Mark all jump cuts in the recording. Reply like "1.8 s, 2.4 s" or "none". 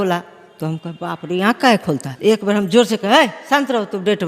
2.1 s